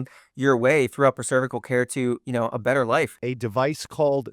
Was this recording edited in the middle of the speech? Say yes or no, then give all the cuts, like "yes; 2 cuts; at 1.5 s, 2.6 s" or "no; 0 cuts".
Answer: yes; 1 cut; at 3.1 s